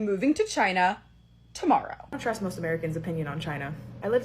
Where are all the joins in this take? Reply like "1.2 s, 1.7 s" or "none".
2.0 s